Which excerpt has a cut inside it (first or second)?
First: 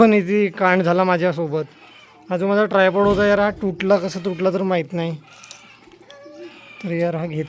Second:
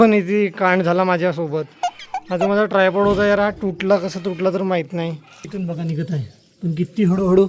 second